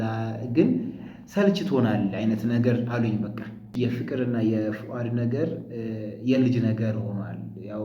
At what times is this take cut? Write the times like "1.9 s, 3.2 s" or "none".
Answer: 3.7 s